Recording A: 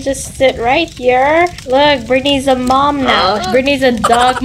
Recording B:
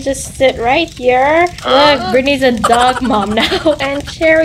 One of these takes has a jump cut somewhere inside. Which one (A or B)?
B